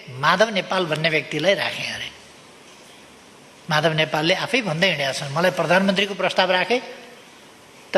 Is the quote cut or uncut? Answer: uncut